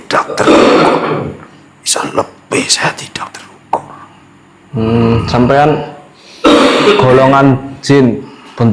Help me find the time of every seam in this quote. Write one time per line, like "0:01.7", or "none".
none